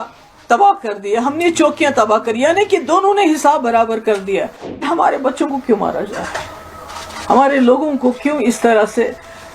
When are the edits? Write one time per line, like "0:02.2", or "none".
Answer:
0:04.9